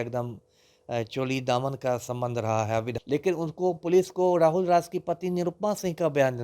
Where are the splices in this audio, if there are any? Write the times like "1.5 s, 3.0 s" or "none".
3.0 s